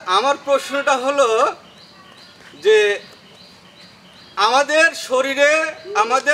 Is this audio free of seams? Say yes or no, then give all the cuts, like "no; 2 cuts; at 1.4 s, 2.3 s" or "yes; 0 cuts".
yes; 0 cuts